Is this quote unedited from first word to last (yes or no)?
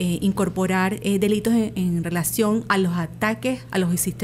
yes